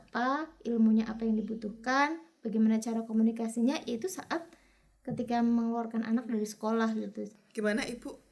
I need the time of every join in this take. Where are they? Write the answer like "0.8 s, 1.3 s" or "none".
7.3 s